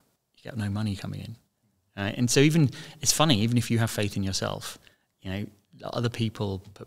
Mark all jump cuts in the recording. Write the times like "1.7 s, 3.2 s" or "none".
none